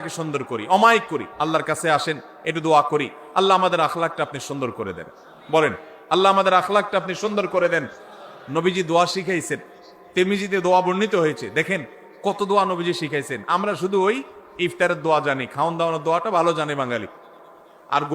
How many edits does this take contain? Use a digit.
1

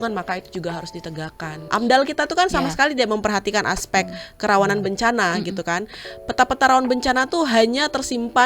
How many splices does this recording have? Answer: 1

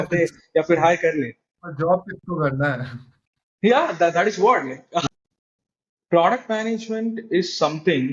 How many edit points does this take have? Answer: 1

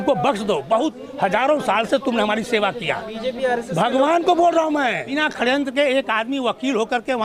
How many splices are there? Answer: 1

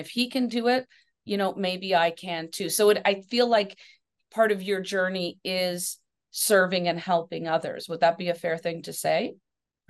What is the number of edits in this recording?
0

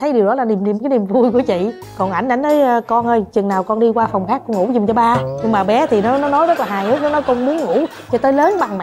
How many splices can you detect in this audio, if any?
0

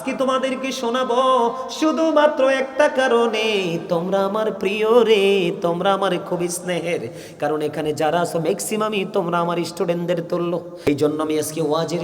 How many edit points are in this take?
1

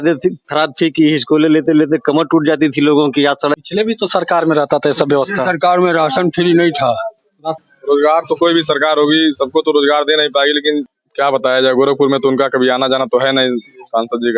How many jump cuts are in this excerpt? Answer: 3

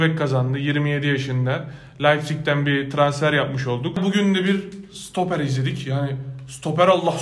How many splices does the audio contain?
1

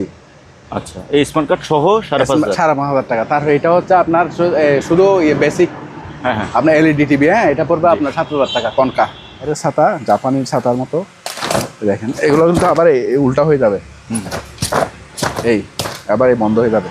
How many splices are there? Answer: 1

